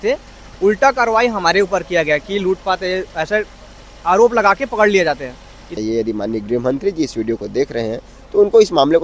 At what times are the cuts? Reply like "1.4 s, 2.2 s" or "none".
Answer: 5.7 s